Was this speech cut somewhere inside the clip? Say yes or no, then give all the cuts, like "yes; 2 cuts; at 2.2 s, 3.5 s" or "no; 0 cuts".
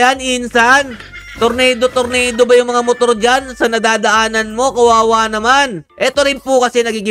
no; 0 cuts